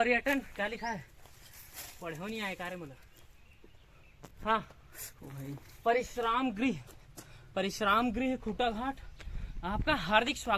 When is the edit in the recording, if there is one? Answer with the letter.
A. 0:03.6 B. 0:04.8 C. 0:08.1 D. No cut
D